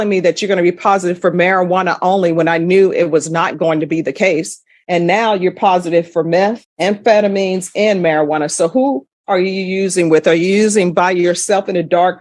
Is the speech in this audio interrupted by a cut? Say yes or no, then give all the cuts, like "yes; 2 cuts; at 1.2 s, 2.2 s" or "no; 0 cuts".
no; 0 cuts